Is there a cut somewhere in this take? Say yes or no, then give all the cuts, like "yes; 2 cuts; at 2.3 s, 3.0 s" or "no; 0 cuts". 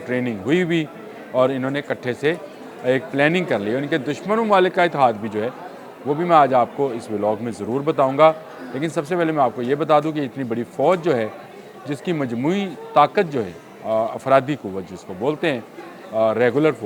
no; 0 cuts